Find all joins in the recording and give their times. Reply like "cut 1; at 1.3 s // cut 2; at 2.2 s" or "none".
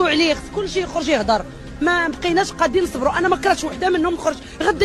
none